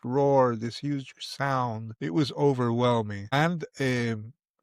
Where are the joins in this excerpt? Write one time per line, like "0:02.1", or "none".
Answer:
0:01.9
0:03.3